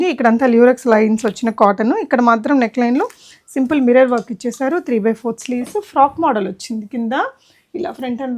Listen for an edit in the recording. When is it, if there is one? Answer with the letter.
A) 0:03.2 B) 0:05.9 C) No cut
C